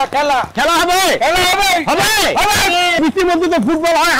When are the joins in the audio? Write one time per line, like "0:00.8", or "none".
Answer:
0:03.0